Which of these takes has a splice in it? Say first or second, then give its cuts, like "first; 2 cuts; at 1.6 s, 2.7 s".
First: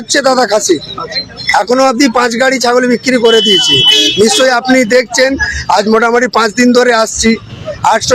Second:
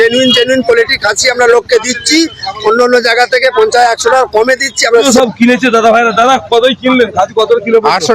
second; 1 cut; at 5.0 s